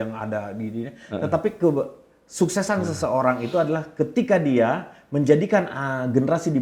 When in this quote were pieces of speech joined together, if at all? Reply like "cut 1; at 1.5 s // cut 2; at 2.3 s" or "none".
none